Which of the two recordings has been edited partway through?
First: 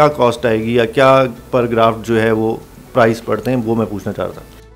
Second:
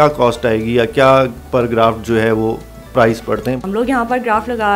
second; 1 cut; at 3.6 s

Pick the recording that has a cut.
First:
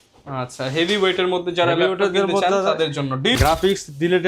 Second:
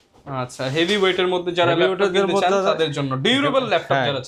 first; 1 cut; at 3.4 s

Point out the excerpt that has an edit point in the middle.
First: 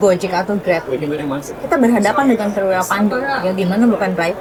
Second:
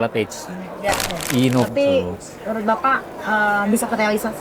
second; 1 cut; at 1.7 s

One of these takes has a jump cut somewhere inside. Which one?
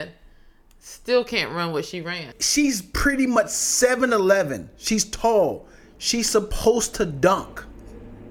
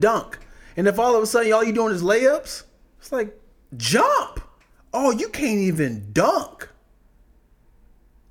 first; 1 cut; at 2.4 s

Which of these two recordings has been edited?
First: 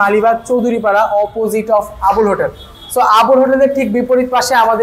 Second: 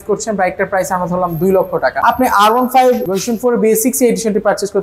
second; 2 cuts; at 2.0 s, 3.1 s

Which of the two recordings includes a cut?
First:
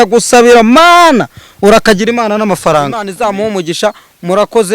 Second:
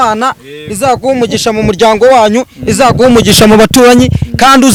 first; 1 cut; at 3.1 s

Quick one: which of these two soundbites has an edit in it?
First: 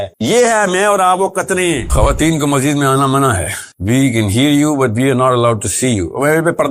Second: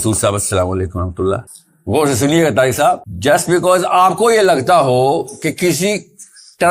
first; 1 cut; at 1.9 s

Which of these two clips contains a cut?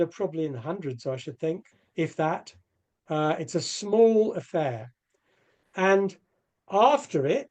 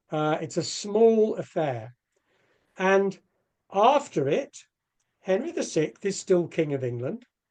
first; 1 cut; at 1.7 s

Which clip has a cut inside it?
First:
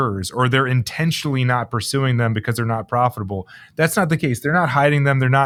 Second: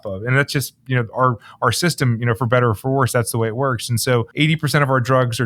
second; 1 cut; at 4.3 s

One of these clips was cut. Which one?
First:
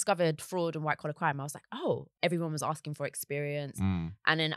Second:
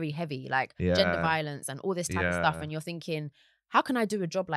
first; 1 cut; at 2.1 s

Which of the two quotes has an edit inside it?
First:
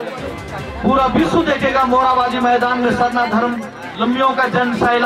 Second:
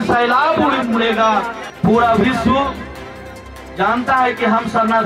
second; 1 cut; at 1.6 s

